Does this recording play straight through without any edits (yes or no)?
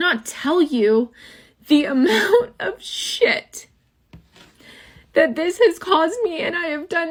yes